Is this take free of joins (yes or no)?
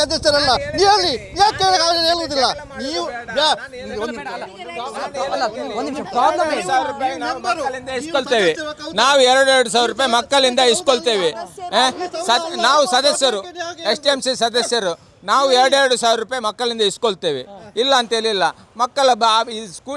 yes